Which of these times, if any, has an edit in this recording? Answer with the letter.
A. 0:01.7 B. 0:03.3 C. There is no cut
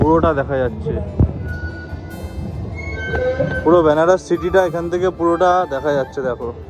C